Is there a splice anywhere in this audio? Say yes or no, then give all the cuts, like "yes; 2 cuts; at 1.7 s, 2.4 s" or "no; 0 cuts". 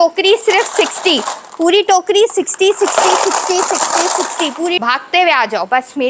yes; 1 cut; at 4.8 s